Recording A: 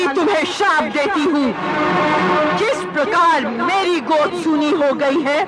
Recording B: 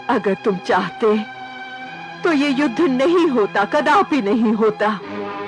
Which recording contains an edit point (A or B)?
A